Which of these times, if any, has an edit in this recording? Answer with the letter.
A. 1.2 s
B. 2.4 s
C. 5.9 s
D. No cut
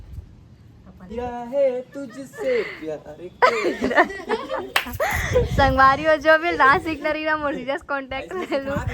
A